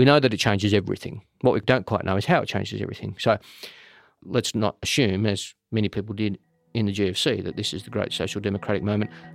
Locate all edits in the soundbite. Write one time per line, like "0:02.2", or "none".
0:01.6
0:04.2